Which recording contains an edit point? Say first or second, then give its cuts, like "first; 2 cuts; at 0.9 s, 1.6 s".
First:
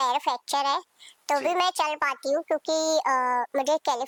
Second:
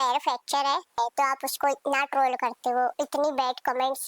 second; 1 cut; at 1.0 s